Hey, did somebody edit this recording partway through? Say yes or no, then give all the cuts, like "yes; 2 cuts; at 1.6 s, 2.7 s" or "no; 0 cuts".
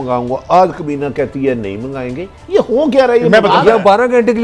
no; 0 cuts